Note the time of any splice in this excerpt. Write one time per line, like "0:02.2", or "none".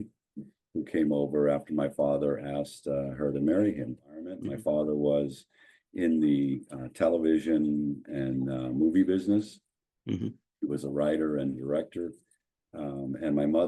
0:04.5